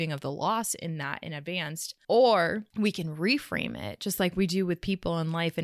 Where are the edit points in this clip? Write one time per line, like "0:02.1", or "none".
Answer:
0:01.9
0:02.7